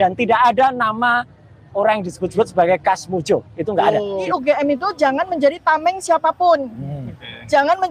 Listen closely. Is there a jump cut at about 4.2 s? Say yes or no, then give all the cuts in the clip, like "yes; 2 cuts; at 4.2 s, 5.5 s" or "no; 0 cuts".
yes; 1 cut; at 4.2 s